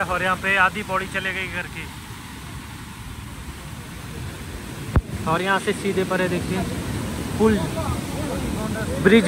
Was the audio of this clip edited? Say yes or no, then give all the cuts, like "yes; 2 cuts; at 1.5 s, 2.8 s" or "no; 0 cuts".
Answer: no; 0 cuts